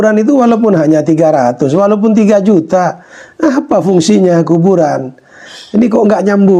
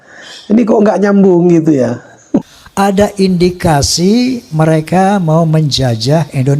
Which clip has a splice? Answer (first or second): second